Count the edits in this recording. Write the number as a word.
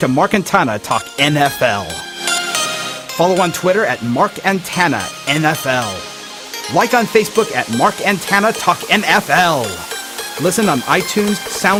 zero